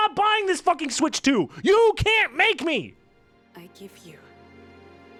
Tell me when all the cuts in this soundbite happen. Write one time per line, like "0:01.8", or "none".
none